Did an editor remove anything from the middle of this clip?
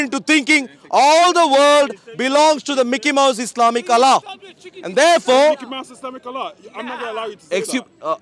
no; 0 cuts

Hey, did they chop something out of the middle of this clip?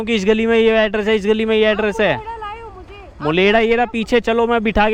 no; 0 cuts

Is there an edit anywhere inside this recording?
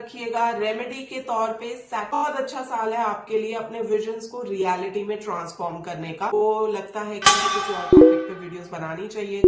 yes; 2 cuts; at 2.2 s, 6.3 s

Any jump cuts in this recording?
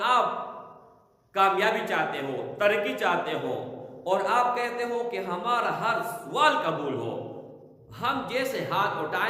no; 0 cuts

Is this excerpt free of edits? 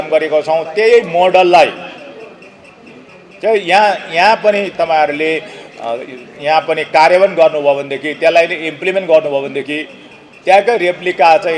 yes; 0 cuts

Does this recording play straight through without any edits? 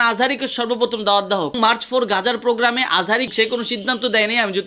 no; 2 cuts; at 1.6 s, 3.3 s

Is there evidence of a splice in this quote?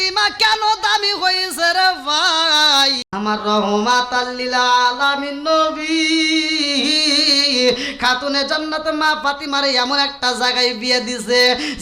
yes; 1 cut; at 3.1 s

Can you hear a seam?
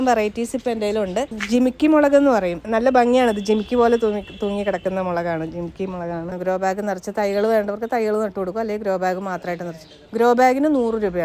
yes; 3 cuts; at 1.3 s, 2.6 s, 6.3 s

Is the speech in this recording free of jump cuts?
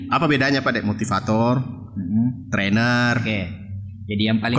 yes; 0 cuts

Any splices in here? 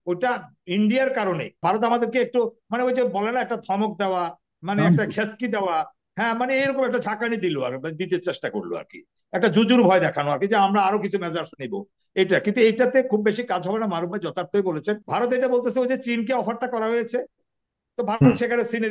yes; 2 cuts; at 1.6 s, 15.0 s

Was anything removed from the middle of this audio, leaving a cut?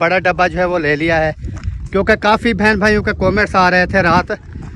no; 0 cuts

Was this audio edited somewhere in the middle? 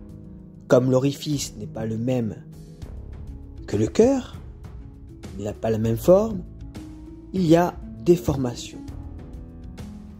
yes; 1 cut; at 9.2 s

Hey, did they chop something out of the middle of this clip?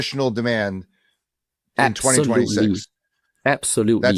no; 0 cuts

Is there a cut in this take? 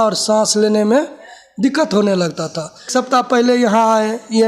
yes; 1 cut; at 2.9 s

